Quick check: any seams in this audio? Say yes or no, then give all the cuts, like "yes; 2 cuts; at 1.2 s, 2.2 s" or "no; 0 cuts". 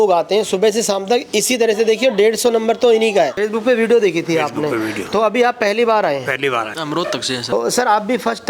yes; 2 cuts; at 3.3 s, 6.7 s